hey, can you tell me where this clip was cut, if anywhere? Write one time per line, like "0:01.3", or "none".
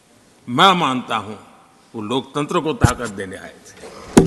none